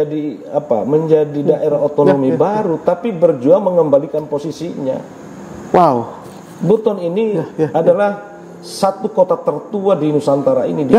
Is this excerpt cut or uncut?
uncut